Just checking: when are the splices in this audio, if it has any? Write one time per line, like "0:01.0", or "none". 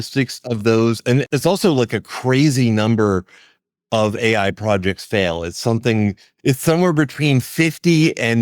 0:01.2